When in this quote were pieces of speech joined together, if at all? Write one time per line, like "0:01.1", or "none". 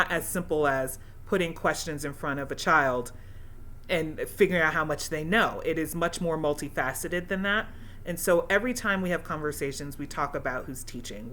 none